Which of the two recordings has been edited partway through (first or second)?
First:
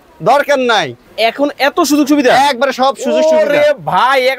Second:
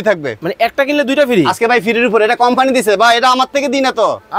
first